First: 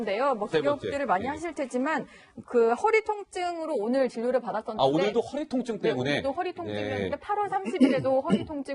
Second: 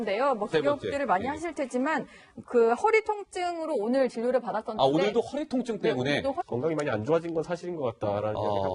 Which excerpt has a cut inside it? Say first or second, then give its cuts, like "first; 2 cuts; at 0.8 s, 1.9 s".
first; 1 cut; at 6.5 s